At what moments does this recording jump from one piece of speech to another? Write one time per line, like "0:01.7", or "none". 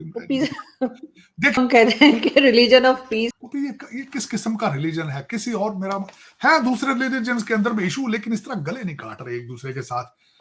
0:01.6
0:03.3